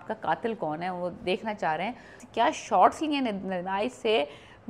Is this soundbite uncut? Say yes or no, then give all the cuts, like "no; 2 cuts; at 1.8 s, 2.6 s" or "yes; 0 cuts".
no; 1 cut; at 2.2 s